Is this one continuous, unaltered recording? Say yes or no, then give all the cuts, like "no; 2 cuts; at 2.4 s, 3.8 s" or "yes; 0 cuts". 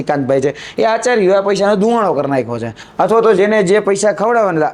yes; 0 cuts